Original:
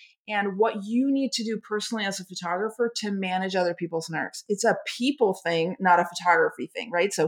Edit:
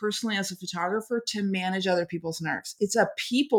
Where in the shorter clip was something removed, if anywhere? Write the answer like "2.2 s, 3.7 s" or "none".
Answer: none